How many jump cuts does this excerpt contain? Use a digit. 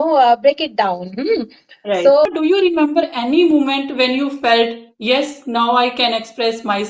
1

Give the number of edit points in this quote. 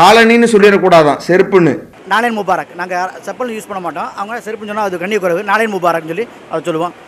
0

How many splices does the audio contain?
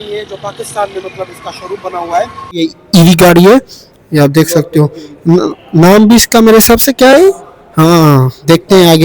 1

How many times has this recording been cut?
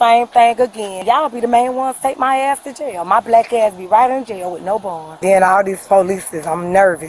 2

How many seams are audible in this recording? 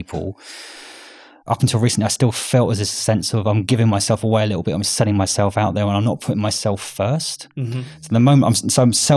1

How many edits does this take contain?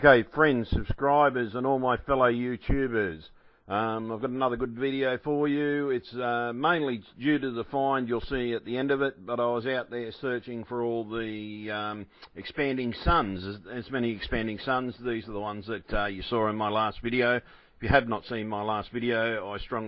0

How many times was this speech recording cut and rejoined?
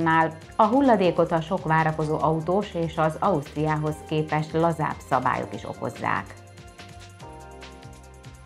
0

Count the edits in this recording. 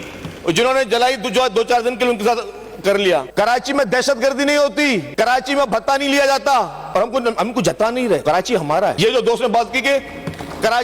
4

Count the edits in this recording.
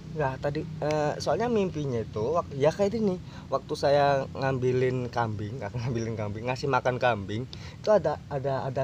2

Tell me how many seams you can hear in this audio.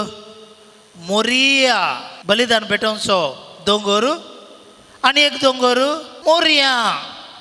2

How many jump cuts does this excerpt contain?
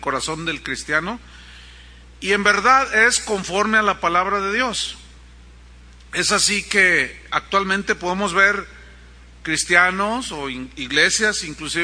0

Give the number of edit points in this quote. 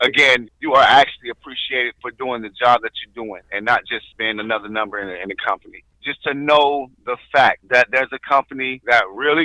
1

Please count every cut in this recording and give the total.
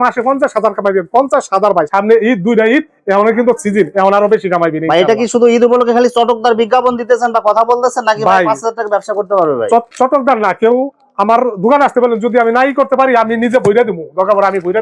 0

